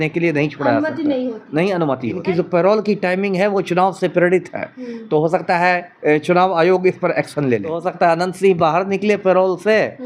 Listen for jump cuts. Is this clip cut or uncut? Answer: cut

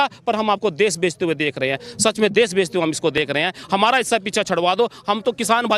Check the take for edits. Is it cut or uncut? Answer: uncut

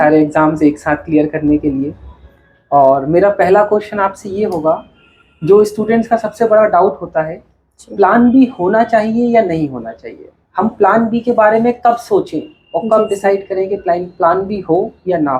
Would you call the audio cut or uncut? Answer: uncut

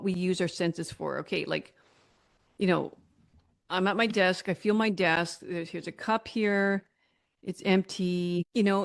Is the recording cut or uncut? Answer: uncut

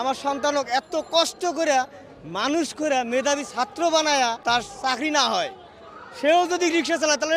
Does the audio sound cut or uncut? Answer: cut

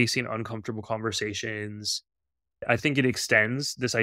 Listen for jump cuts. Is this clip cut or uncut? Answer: uncut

